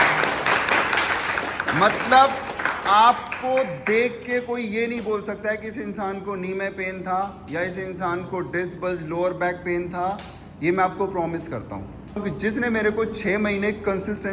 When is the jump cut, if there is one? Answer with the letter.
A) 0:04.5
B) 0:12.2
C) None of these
B